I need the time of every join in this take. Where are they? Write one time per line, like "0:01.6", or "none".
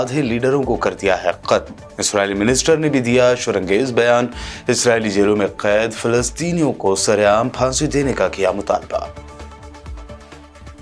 none